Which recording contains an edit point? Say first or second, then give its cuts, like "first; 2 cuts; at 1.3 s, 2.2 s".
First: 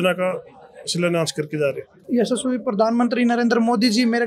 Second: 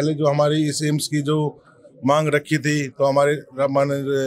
first; 1 cut; at 1.9 s